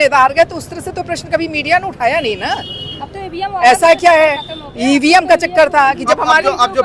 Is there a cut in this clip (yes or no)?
no